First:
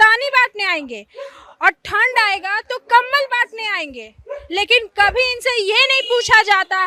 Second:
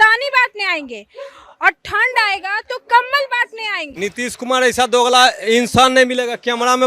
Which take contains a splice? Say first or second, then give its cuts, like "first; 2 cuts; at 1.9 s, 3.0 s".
second; 1 cut; at 3.8 s